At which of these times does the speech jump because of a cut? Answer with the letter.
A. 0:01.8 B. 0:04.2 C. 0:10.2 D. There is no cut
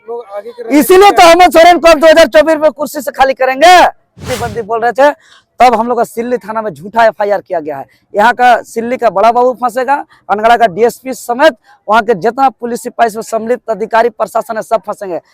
B